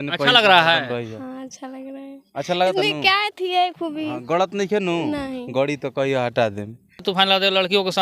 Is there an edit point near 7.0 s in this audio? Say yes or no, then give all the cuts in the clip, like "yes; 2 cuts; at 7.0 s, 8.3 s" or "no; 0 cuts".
yes; 1 cut; at 7.0 s